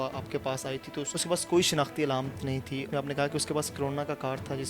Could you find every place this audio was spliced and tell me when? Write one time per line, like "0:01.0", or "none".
0:01.1
0:02.9